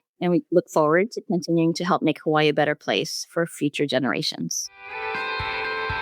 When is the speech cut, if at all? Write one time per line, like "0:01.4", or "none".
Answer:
0:04.7